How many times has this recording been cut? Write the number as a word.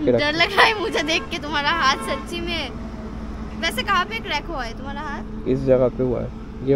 zero